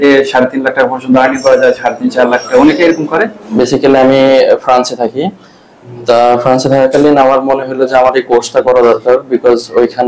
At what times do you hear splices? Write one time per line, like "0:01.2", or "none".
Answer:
0:03.4